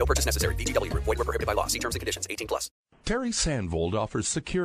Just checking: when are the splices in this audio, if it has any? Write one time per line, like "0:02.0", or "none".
0:02.9